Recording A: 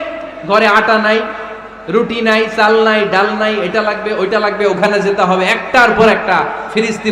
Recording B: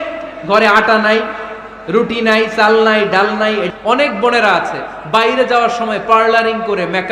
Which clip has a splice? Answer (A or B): B